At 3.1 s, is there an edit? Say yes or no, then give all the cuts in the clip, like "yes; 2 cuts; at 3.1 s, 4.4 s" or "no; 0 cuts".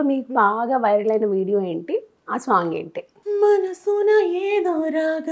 yes; 1 cut; at 3.1 s